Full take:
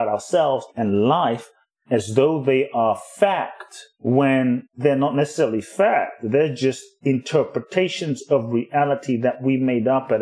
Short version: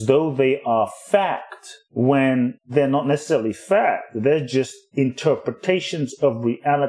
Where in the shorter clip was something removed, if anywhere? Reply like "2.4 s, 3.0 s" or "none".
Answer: none